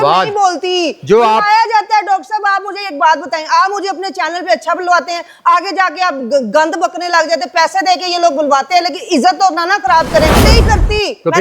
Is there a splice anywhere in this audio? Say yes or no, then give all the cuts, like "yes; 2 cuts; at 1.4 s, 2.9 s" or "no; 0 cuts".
yes; 1 cut; at 10.4 s